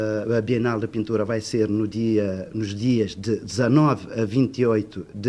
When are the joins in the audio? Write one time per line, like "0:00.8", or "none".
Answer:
0:01.1
0:04.5